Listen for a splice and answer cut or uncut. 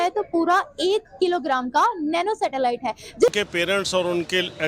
cut